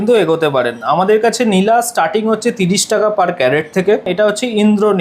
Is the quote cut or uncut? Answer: cut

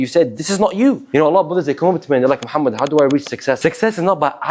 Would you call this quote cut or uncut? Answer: cut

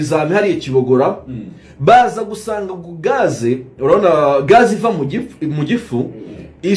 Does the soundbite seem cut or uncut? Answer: uncut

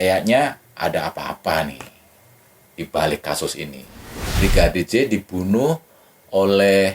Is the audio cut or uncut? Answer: cut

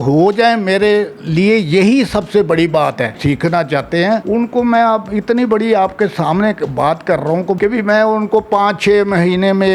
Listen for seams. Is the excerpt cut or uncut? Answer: cut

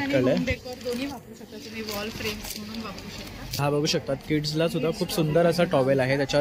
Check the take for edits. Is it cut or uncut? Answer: cut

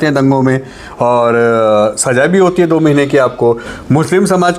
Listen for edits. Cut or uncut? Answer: cut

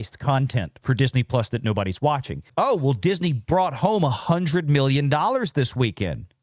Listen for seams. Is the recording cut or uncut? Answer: cut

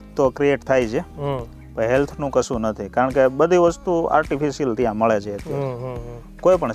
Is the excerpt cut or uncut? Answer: uncut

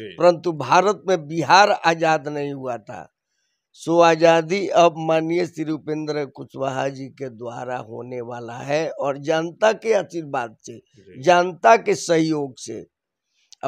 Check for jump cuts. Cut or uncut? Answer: uncut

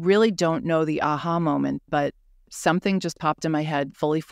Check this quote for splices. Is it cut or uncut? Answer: uncut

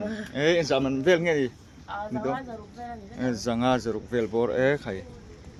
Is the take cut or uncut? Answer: uncut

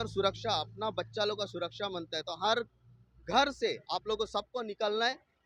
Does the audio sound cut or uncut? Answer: uncut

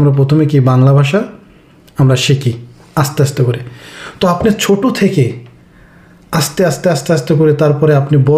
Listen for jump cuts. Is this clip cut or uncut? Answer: uncut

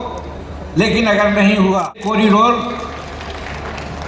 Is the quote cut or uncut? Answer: cut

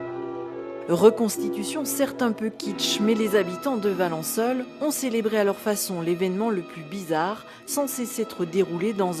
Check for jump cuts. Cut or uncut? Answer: cut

